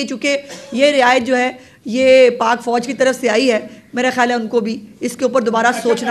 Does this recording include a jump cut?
no; 0 cuts

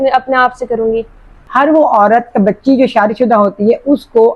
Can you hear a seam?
yes; 1 cut; at 1.6 s

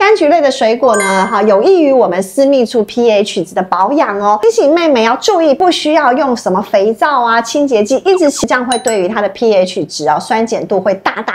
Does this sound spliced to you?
yes; 3 cuts; at 4.4 s, 5.6 s, 8.4 s

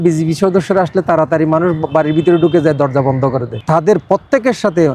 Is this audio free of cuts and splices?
no; 1 cut; at 3.5 s

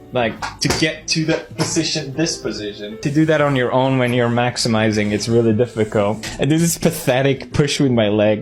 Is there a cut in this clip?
yes; 2 cuts; at 3.0 s, 6.3 s

